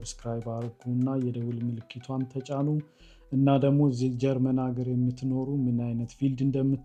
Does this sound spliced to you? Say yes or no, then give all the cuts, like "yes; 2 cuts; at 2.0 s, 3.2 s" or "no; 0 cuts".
no; 0 cuts